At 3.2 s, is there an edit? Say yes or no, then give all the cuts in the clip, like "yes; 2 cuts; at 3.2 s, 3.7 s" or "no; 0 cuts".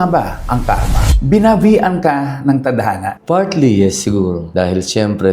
no; 1 cut; at 1.1 s